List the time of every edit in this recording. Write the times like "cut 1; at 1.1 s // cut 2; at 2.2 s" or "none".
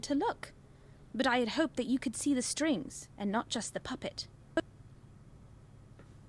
none